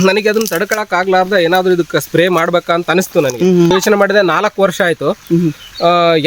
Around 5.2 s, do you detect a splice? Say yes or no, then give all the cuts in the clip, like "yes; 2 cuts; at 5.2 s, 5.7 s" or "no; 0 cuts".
no; 1 cut; at 3.7 s